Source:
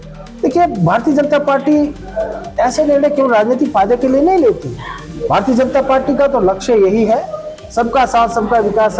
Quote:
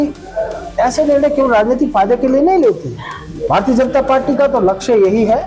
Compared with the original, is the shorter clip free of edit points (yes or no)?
yes